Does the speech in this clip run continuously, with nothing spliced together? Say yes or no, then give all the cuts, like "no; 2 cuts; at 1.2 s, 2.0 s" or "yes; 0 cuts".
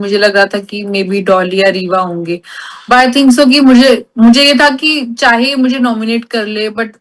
yes; 0 cuts